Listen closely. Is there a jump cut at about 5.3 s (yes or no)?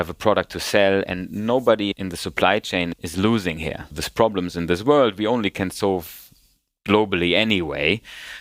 no